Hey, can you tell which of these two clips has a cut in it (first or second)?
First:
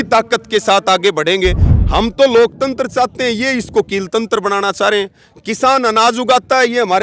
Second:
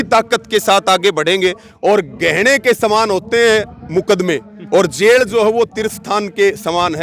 first